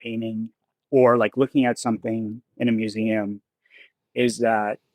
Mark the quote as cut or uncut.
uncut